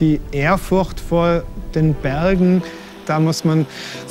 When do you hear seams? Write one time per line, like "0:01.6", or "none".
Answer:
0:03.1